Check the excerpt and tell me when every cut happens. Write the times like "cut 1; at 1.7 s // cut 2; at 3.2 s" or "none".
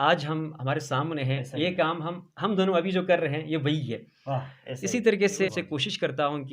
cut 1; at 5.5 s